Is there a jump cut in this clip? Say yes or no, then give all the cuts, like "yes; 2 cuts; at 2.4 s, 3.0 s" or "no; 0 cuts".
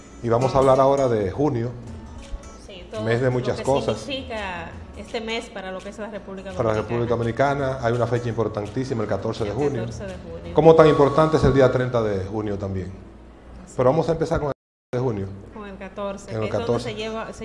no; 0 cuts